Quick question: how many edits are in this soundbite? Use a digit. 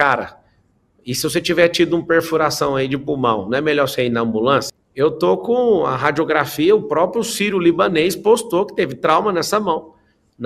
1